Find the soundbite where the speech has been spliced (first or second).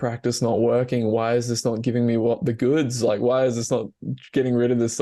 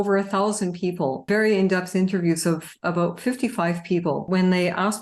second